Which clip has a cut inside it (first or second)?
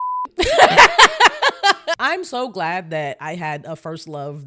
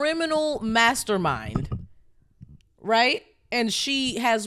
first